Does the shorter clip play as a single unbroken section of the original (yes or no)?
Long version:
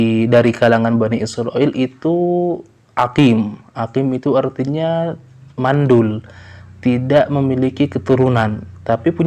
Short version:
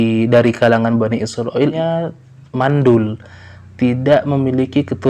no